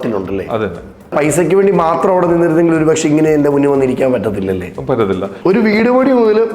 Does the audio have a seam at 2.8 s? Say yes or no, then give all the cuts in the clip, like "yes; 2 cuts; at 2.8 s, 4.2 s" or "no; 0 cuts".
no; 2 cuts; at 1.1 s, 5.3 s